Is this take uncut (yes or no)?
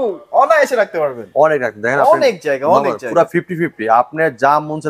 yes